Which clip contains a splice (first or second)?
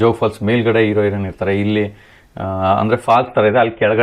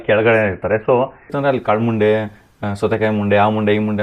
second